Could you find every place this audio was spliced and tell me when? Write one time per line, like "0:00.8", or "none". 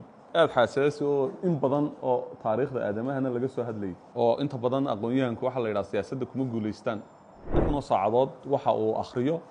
0:04.0
0:07.6